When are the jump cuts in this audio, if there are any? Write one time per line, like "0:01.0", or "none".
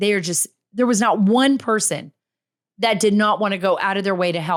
none